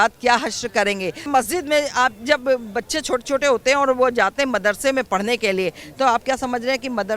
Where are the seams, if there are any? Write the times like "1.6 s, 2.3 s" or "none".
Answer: 1.3 s